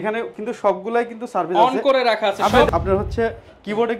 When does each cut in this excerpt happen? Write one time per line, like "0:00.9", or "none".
0:02.7